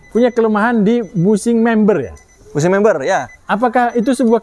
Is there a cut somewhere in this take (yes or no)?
no